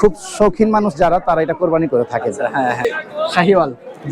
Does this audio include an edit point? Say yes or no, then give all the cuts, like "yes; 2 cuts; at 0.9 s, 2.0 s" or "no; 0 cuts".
yes; 1 cut; at 2.8 s